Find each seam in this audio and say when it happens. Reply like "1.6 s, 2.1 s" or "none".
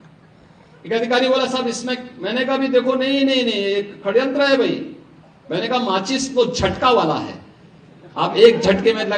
none